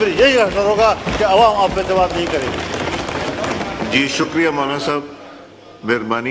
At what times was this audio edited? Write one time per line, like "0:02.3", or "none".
none